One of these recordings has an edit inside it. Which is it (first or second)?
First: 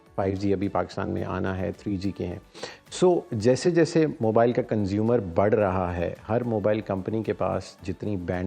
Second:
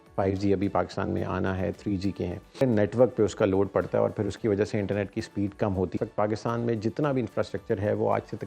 second